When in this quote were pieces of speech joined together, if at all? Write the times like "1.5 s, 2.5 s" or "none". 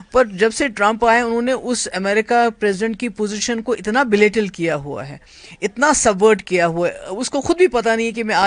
none